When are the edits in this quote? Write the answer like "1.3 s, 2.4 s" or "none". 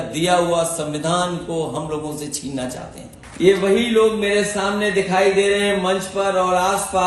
3.2 s